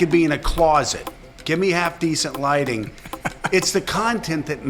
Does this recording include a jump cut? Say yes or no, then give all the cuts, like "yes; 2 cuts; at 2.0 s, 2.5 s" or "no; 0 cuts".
no; 0 cuts